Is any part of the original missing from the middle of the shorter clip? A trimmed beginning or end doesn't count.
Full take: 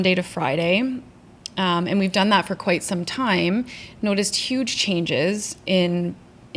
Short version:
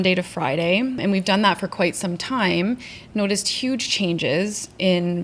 yes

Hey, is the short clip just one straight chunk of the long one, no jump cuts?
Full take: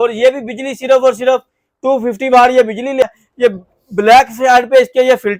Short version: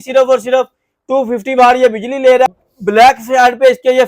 no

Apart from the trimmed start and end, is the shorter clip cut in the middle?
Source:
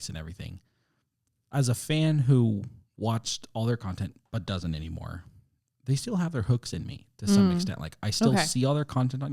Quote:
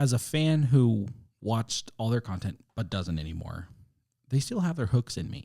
no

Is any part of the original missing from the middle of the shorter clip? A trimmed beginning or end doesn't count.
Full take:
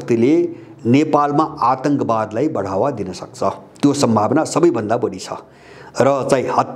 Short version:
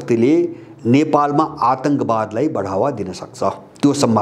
no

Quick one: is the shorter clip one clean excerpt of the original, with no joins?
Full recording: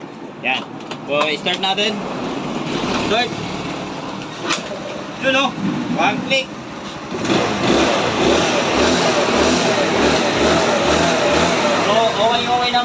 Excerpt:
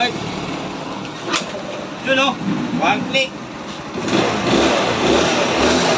yes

